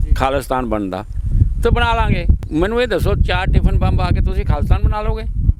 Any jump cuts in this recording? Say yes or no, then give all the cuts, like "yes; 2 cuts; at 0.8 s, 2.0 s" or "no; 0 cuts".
yes; 1 cut; at 2.3 s